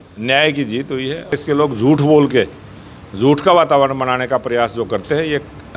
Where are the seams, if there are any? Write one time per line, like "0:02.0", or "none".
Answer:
0:01.3